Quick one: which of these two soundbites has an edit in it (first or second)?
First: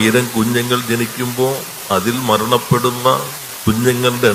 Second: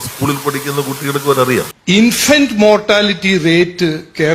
second